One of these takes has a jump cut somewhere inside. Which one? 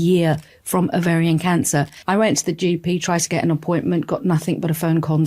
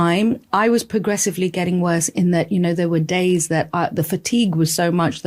first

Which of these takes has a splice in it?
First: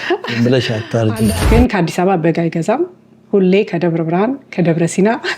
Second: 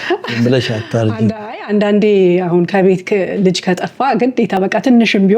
first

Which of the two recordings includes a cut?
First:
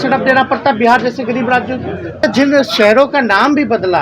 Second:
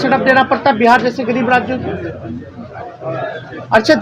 first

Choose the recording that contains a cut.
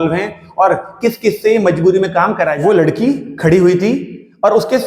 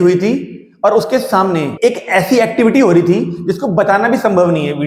first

